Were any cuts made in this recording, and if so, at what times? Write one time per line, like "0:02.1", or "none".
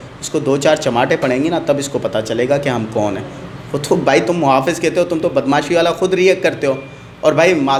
none